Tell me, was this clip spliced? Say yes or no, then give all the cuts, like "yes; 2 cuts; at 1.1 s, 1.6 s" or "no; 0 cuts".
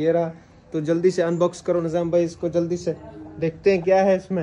no; 0 cuts